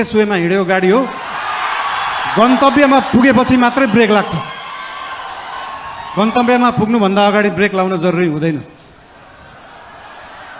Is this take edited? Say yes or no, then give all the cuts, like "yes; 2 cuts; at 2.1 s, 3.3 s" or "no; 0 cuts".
no; 0 cuts